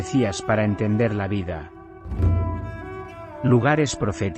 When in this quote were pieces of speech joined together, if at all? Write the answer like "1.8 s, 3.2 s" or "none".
2.1 s, 3.4 s

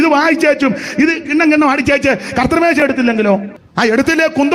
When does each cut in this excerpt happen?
3.6 s

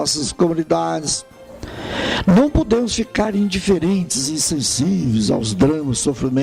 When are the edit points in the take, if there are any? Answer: none

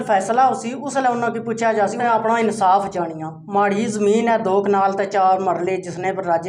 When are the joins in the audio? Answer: 2.0 s

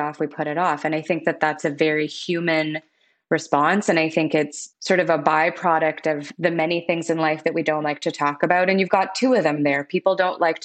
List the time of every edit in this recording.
4.6 s, 6.3 s

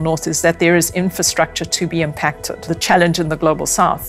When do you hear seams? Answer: 2.5 s

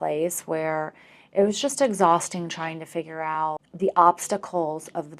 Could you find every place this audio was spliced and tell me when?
3.7 s

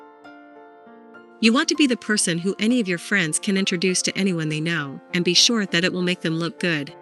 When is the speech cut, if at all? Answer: 1.4 s

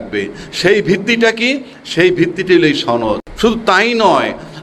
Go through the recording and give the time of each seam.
3.3 s

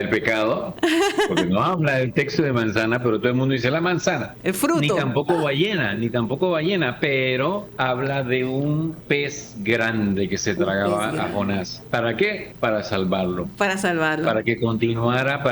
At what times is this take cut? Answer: 4.3 s, 7.7 s, 9.1 s, 11.8 s, 12.5 s

